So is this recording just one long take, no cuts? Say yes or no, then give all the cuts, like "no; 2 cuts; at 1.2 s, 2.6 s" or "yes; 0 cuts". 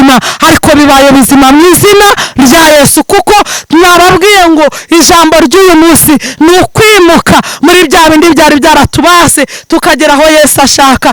yes; 0 cuts